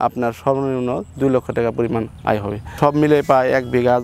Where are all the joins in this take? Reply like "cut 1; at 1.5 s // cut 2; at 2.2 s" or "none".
cut 1; at 2.7 s